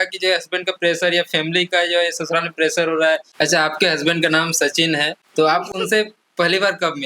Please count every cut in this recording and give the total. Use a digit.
2